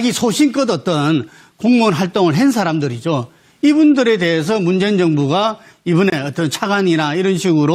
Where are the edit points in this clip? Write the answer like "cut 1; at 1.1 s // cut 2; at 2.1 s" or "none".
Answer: none